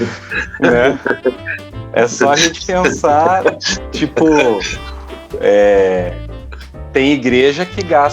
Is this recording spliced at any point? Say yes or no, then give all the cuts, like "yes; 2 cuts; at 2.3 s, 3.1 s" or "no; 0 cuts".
no; 0 cuts